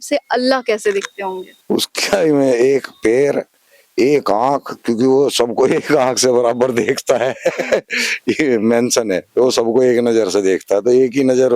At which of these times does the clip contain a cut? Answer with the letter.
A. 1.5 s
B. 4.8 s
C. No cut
A